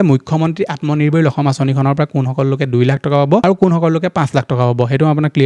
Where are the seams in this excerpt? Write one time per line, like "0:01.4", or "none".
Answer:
0:03.4